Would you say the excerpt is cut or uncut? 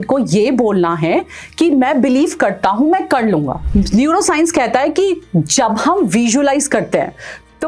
cut